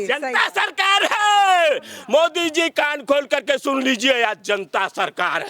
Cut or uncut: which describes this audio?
uncut